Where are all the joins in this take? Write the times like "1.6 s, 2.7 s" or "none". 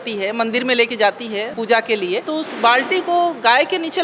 1.5 s, 2.3 s